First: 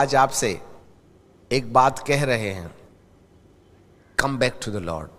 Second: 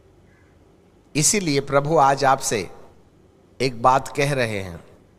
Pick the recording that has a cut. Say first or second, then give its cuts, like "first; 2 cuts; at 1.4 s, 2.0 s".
second; 1 cut; at 1.1 s